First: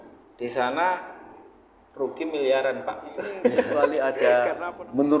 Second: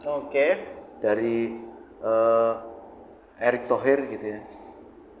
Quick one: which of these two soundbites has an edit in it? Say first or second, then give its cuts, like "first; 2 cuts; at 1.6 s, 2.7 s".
first; 1 cut; at 3.9 s